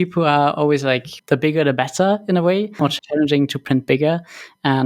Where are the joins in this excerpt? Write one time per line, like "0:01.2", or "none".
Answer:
0:01.1
0:02.9